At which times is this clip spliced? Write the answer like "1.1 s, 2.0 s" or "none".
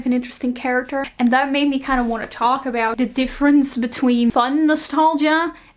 1.1 s, 2.9 s, 4.3 s